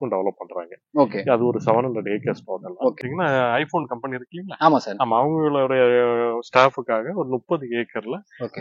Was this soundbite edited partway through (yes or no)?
yes